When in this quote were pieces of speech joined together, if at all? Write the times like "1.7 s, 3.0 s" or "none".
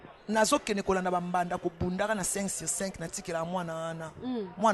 none